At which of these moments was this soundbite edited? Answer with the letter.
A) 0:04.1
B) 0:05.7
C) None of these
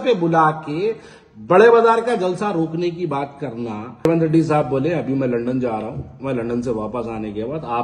A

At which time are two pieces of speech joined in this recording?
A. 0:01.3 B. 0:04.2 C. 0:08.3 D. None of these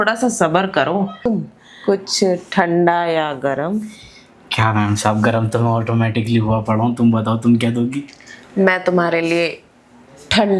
A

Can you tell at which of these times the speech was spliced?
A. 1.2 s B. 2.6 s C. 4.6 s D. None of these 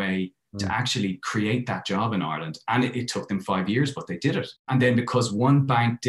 C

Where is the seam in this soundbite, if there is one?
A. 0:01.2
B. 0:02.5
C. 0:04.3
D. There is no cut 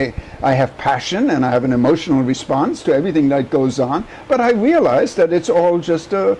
D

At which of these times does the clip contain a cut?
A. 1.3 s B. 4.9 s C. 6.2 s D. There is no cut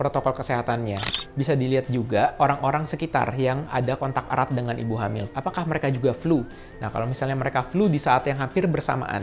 A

